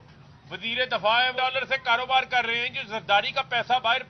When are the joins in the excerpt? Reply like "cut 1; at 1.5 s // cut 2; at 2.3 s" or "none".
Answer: cut 1; at 1.4 s